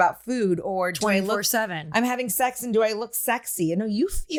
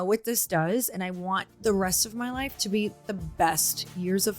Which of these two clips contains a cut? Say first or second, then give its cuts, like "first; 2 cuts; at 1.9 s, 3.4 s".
second; 2 cuts; at 1.5 s, 3.1 s